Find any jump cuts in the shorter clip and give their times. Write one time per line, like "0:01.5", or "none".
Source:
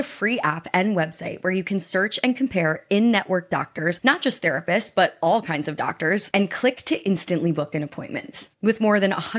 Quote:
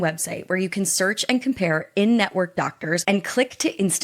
0:03.0

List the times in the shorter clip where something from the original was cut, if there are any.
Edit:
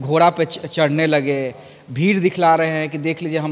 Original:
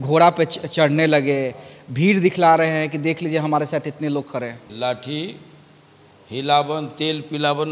none

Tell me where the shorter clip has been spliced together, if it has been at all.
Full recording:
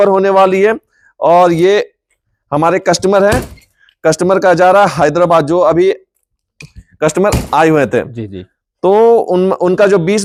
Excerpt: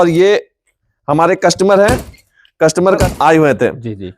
0:03.0

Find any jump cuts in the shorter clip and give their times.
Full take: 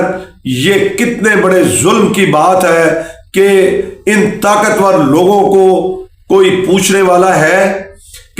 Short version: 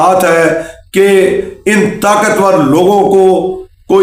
none

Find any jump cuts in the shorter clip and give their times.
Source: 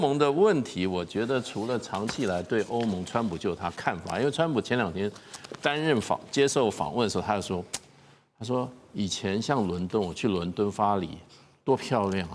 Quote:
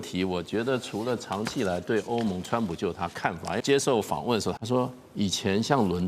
0:03.6
0:04.6

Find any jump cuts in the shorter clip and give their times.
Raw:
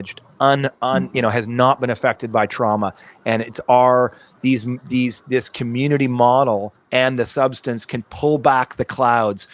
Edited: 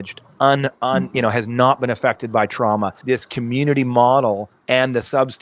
0:03.0

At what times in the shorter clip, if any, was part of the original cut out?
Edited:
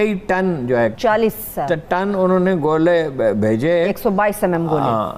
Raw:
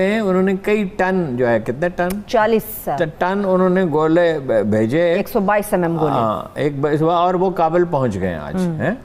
0:00.9

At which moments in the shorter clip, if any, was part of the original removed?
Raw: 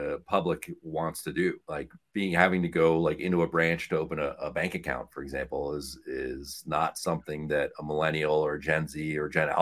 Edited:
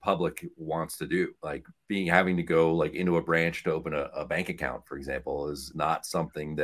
0:05.7

